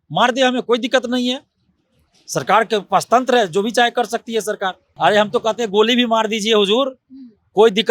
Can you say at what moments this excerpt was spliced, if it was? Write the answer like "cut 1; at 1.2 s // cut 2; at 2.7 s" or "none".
cut 1; at 4.8 s